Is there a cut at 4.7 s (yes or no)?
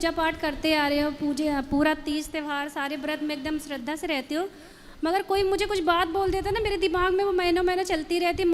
no